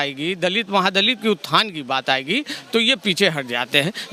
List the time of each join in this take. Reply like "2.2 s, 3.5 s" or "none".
none